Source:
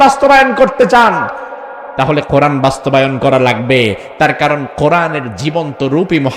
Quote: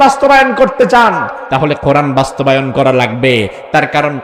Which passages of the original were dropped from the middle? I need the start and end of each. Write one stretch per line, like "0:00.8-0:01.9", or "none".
0:01.4-0:01.8